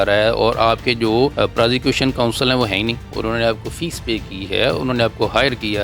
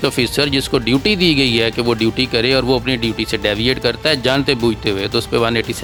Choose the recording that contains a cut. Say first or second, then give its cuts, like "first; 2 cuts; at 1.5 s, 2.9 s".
first; 2 cuts; at 1.3 s, 3.1 s